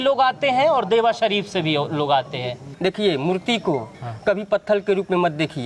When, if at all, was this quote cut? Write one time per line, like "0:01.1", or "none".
0:02.7